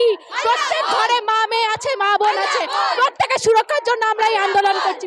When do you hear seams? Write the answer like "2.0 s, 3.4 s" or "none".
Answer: none